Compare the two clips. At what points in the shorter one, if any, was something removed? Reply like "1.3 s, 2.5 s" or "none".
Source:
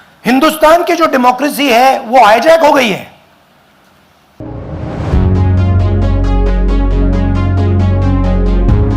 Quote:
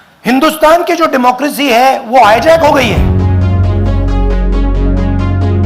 3.0 s